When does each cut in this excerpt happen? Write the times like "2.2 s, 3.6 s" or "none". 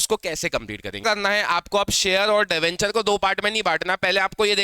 1.0 s